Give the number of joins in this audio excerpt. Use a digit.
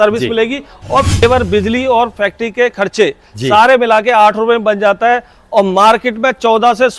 1